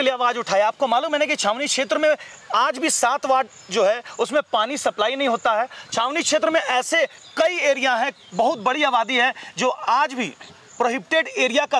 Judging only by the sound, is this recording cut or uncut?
uncut